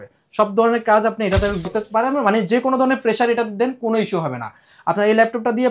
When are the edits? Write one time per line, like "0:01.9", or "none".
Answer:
0:01.7